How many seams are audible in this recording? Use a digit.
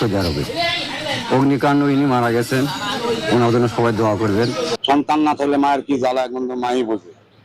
1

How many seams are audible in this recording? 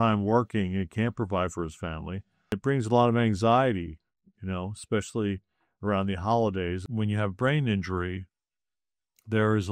2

